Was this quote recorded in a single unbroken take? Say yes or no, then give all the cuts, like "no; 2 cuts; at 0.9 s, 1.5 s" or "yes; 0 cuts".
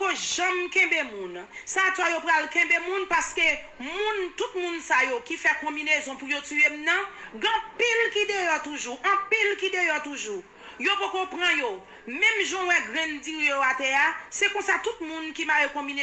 yes; 0 cuts